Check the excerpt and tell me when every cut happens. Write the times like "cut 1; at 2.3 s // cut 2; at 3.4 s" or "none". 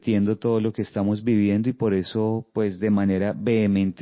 none